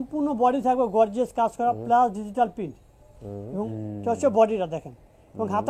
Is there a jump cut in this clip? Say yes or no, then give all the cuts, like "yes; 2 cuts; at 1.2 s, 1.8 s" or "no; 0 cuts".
yes; 1 cut; at 3.7 s